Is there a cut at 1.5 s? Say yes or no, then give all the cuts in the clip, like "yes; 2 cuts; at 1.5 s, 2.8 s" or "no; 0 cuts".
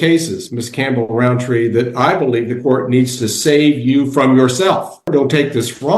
no; 1 cut; at 5.1 s